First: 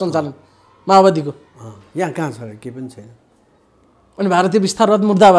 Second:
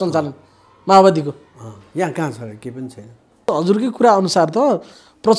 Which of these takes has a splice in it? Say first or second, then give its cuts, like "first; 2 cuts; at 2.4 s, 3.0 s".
second; 1 cut; at 3.5 s